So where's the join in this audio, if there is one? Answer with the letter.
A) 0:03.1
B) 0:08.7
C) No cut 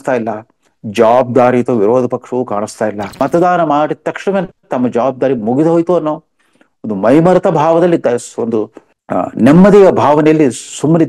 A